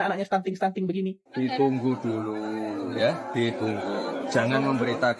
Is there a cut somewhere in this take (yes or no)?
yes